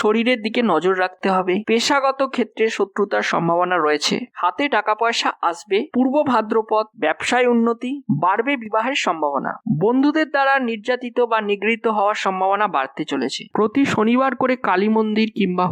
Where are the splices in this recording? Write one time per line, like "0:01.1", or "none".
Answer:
0:04.3
0:05.9
0:13.4